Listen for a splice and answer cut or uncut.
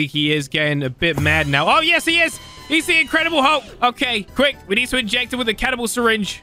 uncut